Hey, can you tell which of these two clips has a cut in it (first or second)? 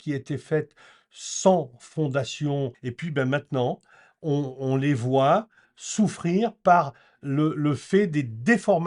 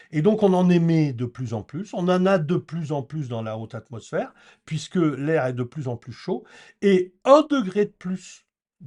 first